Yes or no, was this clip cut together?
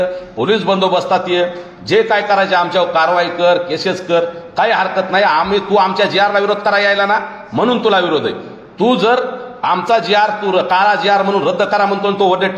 no